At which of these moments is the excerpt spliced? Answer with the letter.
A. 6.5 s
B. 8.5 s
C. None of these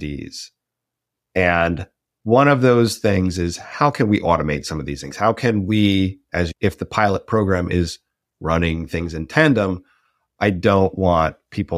A